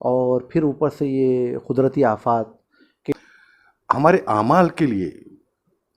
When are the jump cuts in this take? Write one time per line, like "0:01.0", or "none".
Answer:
0:03.1